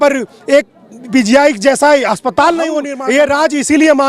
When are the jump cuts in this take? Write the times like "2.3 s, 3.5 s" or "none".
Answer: 2.9 s